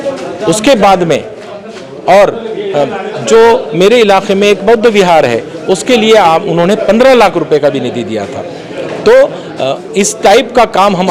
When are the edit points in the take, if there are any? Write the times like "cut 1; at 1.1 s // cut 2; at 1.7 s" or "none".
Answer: none